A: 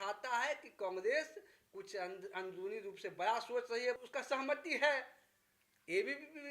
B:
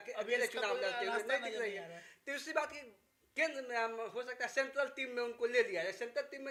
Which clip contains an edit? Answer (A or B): A